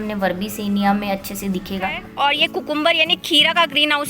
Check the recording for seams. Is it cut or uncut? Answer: cut